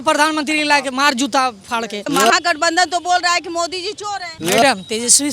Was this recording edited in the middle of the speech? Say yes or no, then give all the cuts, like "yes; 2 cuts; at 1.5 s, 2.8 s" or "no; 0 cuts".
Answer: yes; 2 cuts; at 2.0 s, 4.3 s